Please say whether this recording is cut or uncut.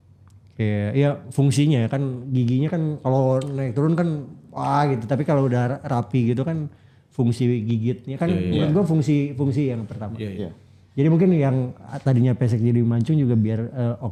uncut